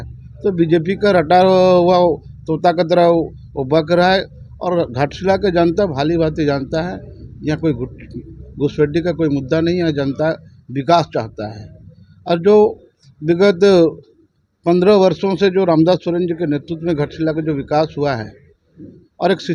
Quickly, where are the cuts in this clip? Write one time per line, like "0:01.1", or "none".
none

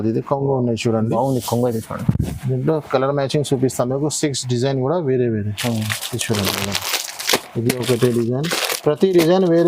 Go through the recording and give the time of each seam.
none

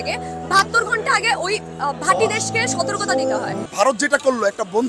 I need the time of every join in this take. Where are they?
0:03.6

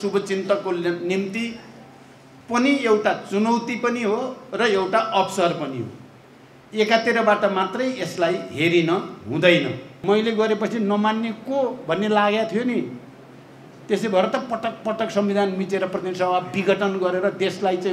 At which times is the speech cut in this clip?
0:09.9

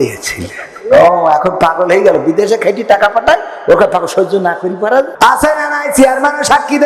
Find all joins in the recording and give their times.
0:05.1

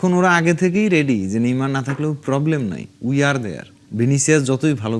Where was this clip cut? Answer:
0:03.9

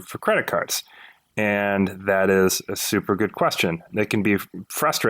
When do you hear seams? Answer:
0:03.9

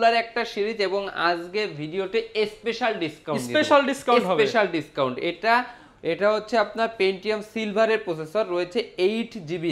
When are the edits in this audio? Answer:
none

